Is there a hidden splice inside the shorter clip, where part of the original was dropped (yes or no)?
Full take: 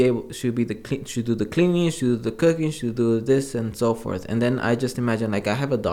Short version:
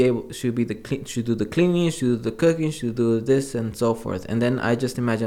no